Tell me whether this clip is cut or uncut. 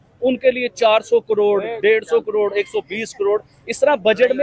uncut